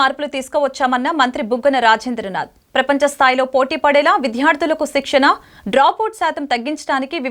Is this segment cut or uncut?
uncut